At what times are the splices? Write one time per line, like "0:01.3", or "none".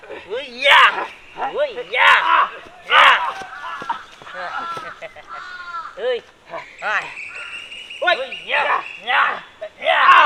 none